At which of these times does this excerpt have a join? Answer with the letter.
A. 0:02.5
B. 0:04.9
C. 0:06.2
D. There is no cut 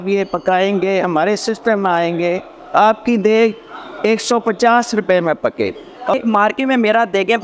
C